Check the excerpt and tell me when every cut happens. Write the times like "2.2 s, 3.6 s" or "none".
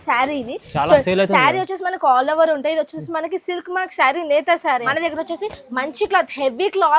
4.9 s